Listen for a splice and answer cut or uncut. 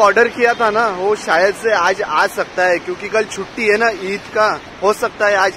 uncut